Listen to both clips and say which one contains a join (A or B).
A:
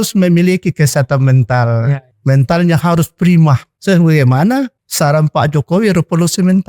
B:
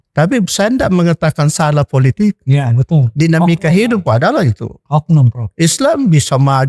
A